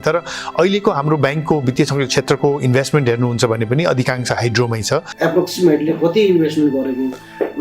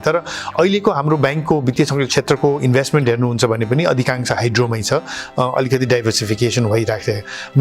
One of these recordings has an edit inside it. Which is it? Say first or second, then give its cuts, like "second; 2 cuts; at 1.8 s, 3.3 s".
first; 1 cut; at 5.1 s